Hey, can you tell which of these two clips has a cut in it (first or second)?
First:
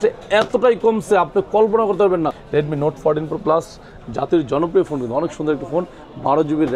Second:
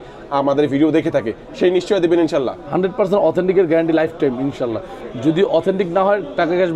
first